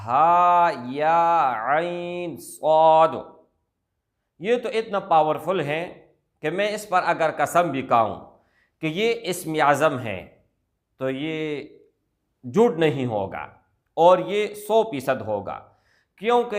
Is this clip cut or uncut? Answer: uncut